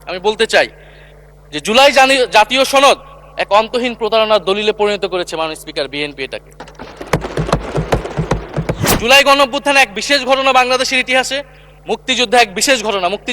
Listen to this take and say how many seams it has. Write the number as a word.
one